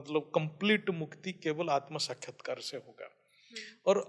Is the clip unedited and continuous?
yes; 0 cuts

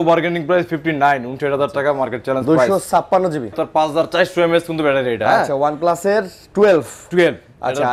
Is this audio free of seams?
no; 1 cut; at 3.6 s

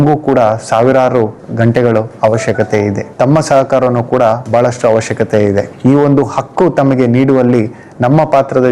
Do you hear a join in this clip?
yes; 2 cuts; at 3.0 s, 5.7 s

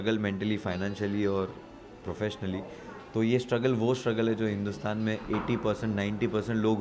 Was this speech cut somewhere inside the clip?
no; 0 cuts

